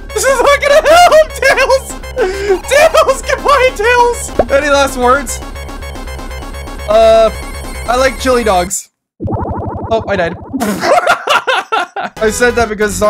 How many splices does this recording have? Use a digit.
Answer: 1